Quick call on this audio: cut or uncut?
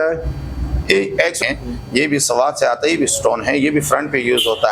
cut